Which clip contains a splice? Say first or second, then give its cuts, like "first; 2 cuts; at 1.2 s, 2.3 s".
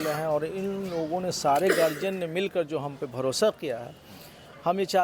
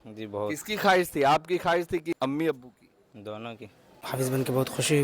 second; 2 cuts; at 2.1 s, 4.0 s